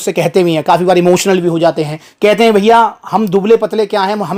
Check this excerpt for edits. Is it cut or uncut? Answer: uncut